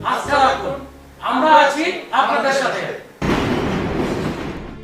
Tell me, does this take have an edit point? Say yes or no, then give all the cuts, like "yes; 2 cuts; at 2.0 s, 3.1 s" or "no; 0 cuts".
yes; 1 cut; at 3.1 s